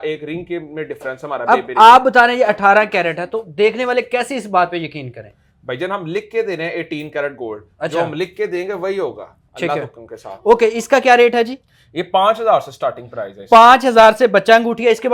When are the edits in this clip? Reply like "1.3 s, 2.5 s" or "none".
none